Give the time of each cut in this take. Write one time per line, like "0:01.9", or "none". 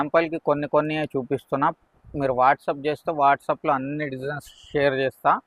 none